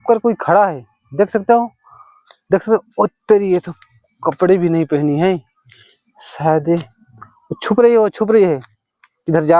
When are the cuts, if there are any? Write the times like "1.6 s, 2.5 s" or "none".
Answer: none